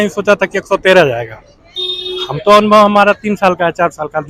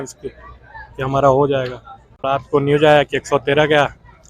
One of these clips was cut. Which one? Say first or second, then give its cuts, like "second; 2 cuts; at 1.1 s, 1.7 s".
second; 1 cut; at 2.2 s